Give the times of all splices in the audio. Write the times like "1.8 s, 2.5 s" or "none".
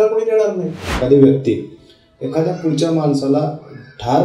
1.0 s